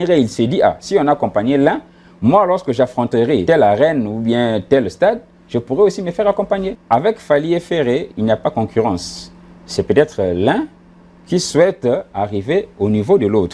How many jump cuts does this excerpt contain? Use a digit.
2